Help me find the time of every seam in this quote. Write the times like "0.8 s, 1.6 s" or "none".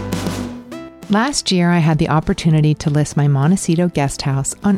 0.9 s